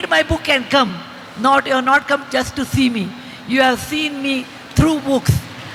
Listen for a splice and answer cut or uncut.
uncut